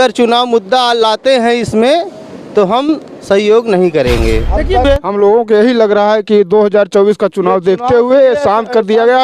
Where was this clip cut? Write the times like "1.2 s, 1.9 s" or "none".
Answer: 4.8 s